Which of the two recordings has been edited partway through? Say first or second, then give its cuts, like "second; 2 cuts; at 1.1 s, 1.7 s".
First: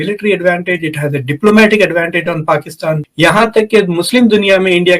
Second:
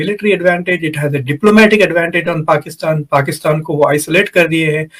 first; 1 cut; at 2.9 s